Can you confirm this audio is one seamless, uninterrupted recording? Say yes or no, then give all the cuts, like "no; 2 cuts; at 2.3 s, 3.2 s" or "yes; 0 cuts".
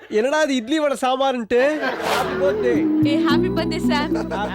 no; 1 cut; at 2.1 s